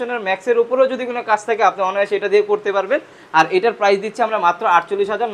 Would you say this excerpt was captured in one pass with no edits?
yes; 0 cuts

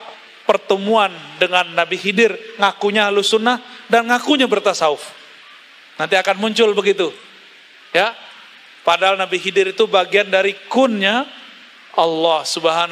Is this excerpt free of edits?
yes; 0 cuts

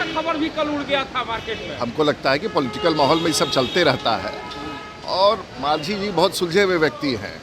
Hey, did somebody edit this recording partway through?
no; 0 cuts

